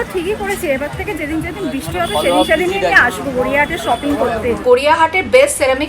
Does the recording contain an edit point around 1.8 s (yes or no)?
no